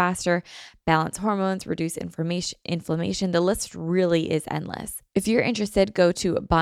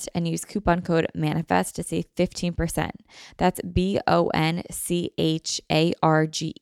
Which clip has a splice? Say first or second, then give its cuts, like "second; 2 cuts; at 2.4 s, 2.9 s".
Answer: first; 1 cut; at 4.9 s